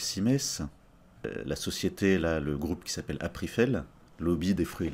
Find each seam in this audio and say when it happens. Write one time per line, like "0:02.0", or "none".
0:01.3
0:04.0